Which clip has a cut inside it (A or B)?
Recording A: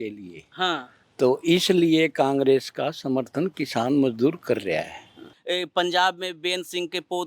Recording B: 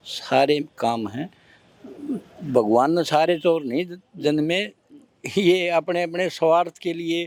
A